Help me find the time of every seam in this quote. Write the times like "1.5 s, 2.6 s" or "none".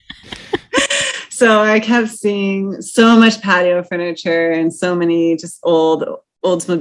none